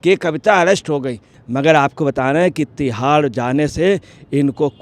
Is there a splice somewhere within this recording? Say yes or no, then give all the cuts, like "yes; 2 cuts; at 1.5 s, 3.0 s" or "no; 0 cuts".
yes; 1 cut; at 1.3 s